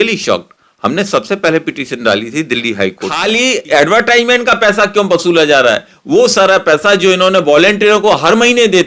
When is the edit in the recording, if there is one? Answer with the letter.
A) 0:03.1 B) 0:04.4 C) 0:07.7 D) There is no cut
A